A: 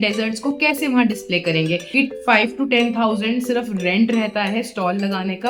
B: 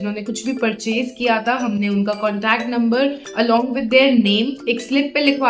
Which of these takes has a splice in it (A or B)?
A